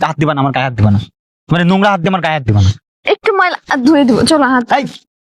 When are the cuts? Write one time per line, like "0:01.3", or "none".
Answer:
none